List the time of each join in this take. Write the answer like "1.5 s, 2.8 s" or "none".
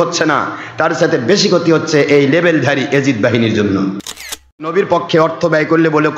4.1 s